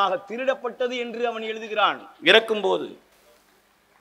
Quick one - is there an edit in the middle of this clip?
no; 0 cuts

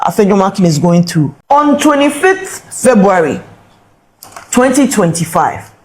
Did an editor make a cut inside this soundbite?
yes; 1 cut; at 1.4 s

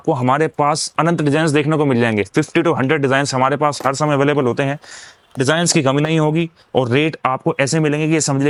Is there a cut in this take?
no; 0 cuts

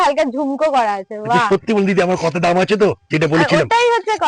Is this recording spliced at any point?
no; 0 cuts

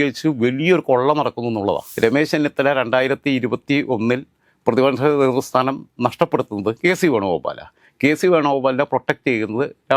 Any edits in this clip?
yes; 1 cut; at 1.9 s

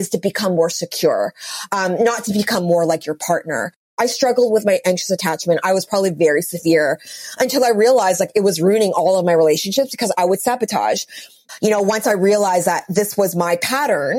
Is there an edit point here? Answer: yes; 2 cuts; at 4.0 s, 11.4 s

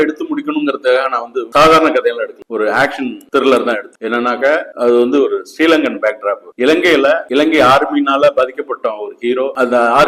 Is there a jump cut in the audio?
no; 0 cuts

